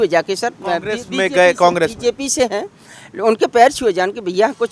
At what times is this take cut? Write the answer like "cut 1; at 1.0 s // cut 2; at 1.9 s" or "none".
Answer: none